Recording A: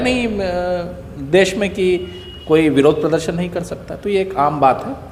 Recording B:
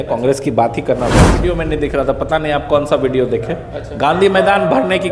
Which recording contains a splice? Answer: B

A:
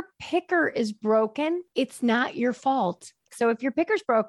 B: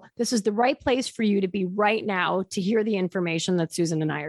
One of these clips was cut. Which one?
A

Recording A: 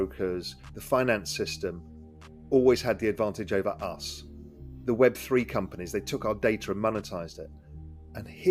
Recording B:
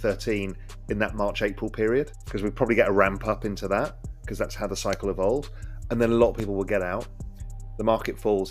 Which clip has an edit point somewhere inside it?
B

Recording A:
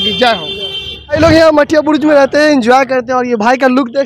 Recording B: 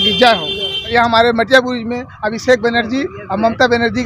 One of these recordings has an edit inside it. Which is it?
B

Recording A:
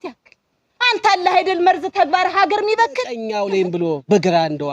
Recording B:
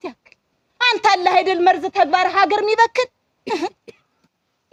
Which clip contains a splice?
A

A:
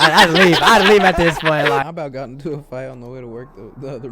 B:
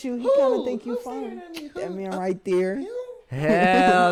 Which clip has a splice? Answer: A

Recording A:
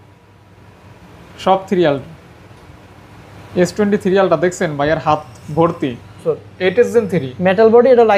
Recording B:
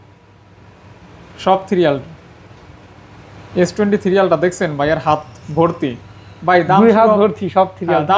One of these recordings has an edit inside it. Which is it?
A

